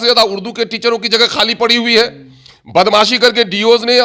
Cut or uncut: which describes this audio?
uncut